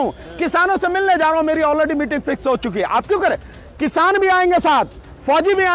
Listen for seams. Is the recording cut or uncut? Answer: uncut